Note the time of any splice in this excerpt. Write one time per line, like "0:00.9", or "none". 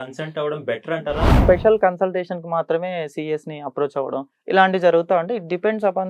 0:01.4